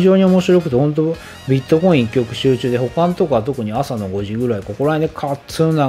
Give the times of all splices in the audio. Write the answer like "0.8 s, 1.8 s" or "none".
none